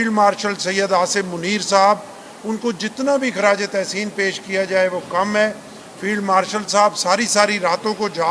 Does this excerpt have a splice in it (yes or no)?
no